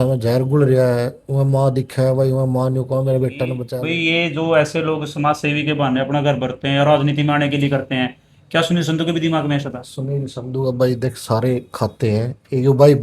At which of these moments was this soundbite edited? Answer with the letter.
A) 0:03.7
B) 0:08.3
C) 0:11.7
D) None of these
A